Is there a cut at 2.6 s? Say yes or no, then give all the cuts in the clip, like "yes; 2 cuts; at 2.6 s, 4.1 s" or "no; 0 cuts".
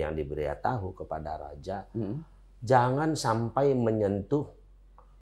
no; 0 cuts